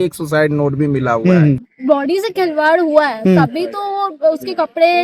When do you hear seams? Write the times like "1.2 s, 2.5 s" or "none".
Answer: 1.7 s